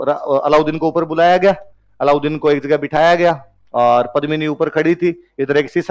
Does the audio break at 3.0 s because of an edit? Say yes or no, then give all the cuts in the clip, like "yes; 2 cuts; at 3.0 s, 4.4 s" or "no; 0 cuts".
no; 0 cuts